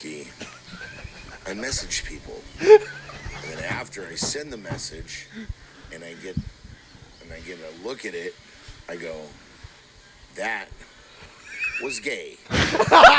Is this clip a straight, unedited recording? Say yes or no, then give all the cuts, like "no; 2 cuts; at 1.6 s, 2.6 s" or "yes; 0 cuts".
yes; 0 cuts